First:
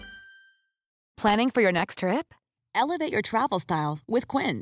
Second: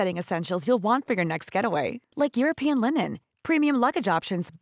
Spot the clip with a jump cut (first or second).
first